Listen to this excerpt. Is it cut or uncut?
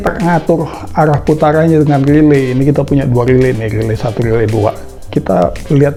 uncut